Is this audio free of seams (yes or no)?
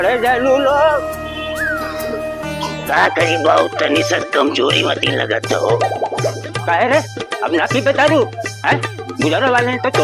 no